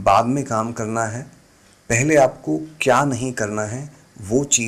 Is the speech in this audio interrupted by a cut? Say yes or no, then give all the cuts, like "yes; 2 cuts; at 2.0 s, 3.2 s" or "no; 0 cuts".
no; 0 cuts